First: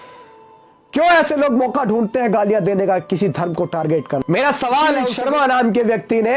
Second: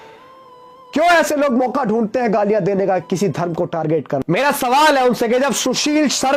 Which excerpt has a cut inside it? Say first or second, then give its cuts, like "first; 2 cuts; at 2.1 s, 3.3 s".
first; 1 cut; at 5.1 s